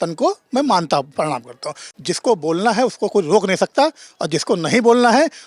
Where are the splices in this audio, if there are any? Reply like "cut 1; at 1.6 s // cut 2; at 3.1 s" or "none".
cut 1; at 1.8 s